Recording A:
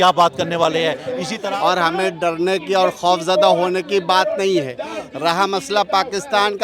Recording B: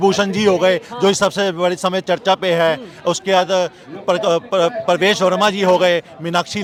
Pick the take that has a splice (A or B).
A